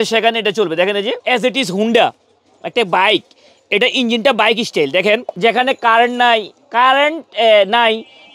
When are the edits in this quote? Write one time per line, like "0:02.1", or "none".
0:01.1
0:05.3